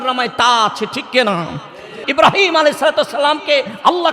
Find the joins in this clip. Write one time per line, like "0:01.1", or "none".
0:02.0

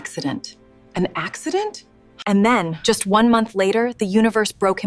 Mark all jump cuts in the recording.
0:02.1

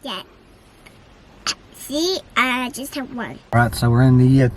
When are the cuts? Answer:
0:03.5

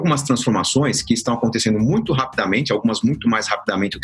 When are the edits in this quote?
none

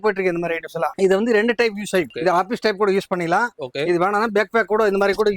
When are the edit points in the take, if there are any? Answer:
0:00.9
0:02.1

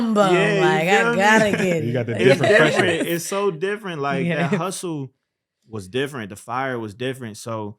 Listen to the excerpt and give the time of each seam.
none

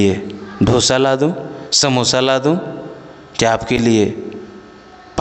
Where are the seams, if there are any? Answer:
none

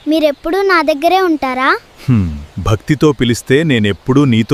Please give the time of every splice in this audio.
none

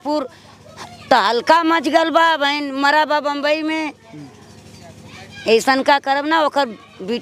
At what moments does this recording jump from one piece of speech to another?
none

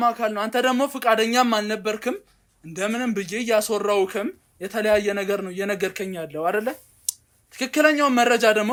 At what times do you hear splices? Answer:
none

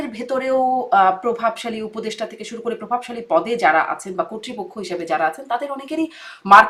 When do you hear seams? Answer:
none

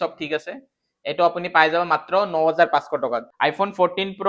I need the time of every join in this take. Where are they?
0:03.2

